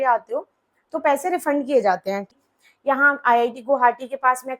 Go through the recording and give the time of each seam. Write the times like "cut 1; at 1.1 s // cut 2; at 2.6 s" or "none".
cut 1; at 2.3 s